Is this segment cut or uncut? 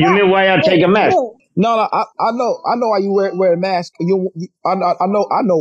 cut